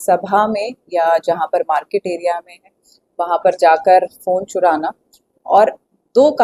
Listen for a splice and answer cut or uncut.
uncut